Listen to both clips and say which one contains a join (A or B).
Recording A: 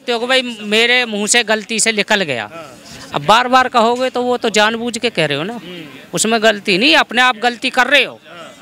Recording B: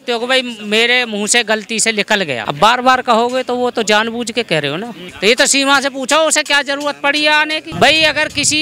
B